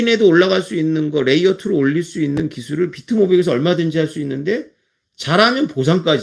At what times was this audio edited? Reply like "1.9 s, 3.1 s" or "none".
none